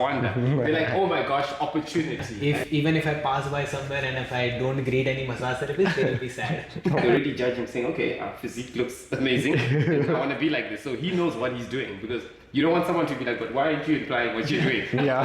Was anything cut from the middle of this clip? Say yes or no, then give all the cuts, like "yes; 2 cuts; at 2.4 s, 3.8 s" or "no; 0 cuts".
yes; 2 cuts; at 2.6 s, 7.0 s